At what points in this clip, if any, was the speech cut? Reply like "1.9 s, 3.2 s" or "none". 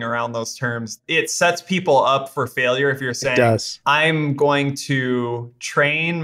0.9 s